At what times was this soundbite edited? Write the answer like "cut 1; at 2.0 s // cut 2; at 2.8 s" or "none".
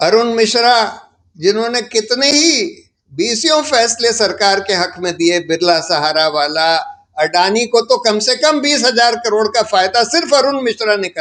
none